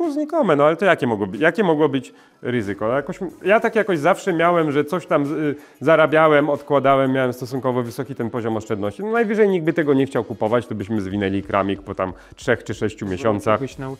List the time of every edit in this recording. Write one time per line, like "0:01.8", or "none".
none